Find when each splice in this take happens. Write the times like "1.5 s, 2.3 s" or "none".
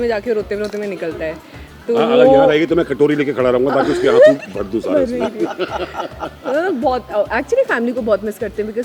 none